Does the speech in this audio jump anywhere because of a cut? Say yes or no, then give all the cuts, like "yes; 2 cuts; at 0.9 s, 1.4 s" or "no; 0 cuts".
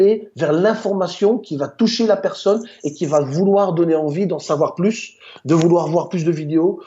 no; 0 cuts